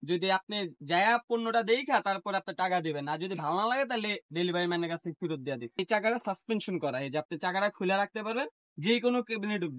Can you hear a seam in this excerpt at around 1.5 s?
no; 1 cut; at 5.8 s

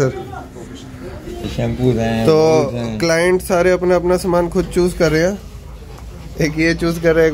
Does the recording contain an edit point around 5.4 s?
no; 1 cut; at 1.4 s

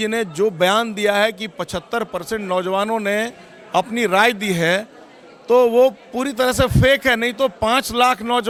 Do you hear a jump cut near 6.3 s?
no; 0 cuts

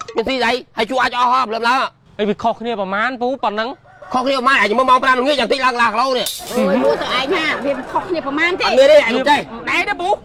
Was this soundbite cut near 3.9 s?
no; 0 cuts

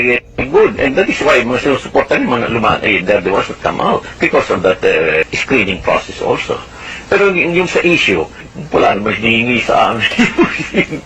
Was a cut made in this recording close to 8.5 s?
yes; 3 cuts; at 4.1 s, 5.4 s, 8.5 s

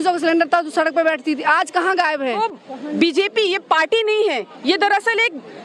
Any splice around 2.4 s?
yes; 1 cut; at 2.4 s

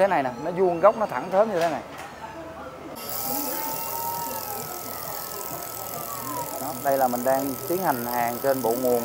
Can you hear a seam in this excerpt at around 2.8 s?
yes; 1 cut; at 2.8 s

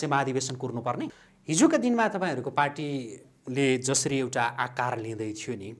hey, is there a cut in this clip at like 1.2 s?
yes; 1 cut; at 1.2 s

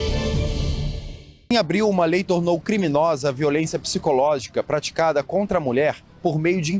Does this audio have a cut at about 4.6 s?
no; 1 cut; at 1.5 s

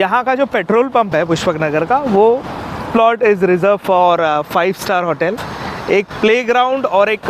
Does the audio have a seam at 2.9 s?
yes; 2 cuts; at 2.9 s, 5.4 s

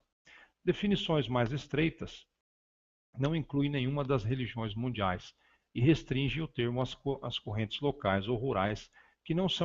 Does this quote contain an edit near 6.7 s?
no; 1 cut; at 2.1 s

